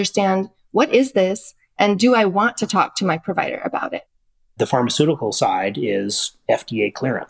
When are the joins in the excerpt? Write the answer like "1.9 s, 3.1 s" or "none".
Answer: 4.0 s